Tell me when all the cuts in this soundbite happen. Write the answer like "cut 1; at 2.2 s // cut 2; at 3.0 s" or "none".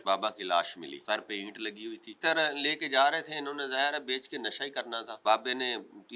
cut 1; at 1.0 s // cut 2; at 2.2 s // cut 3; at 5.1 s